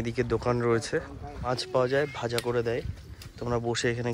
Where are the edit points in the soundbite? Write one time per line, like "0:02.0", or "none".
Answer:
0:01.5